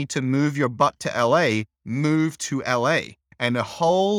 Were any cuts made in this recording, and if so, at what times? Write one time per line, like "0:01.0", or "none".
0:03.2